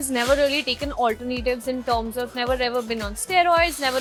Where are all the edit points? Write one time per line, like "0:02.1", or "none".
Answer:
none